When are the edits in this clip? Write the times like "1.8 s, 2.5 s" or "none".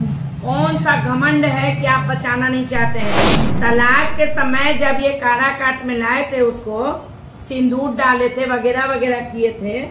3.4 s